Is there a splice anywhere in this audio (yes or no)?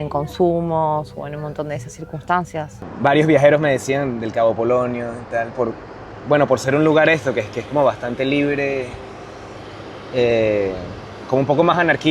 yes